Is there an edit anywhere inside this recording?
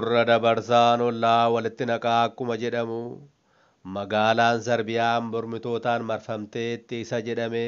no; 0 cuts

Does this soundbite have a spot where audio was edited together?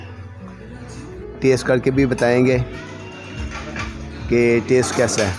yes; 1 cut; at 1.2 s

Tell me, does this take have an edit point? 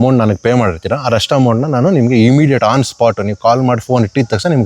no; 0 cuts

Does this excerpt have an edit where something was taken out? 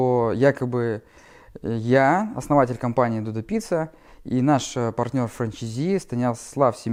no; 0 cuts

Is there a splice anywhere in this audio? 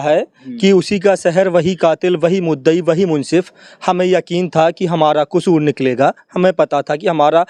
no; 0 cuts

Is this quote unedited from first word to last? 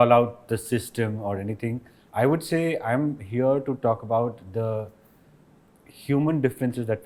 yes; 0 cuts

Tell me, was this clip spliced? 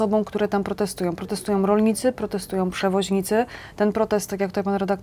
no; 0 cuts

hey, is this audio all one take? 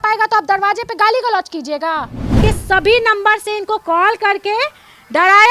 no; 1 cut; at 2.4 s

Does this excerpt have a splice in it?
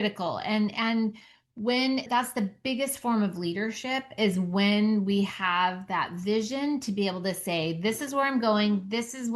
yes; 1 cut; at 2.1 s

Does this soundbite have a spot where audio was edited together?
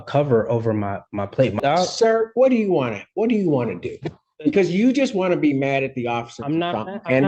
yes; 1 cut; at 1.6 s

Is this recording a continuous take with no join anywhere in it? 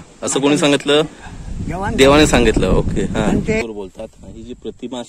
no; 1 cut; at 3.6 s

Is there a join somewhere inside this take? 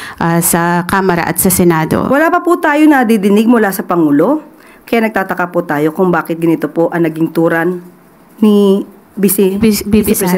yes; 1 cut; at 2.1 s

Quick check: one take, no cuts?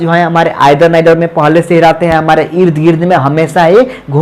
yes; 0 cuts

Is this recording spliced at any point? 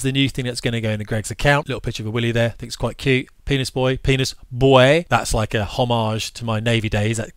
yes; 2 cuts; at 1.7 s, 5.1 s

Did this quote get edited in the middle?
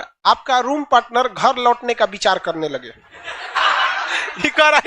yes; 1 cut; at 3.5 s

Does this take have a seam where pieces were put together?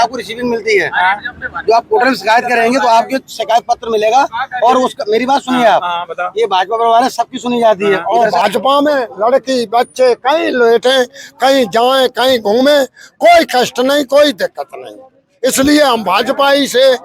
yes; 1 cut; at 8.0 s

